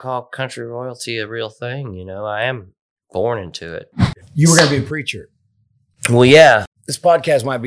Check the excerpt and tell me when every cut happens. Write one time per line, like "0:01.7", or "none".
0:04.2
0:06.7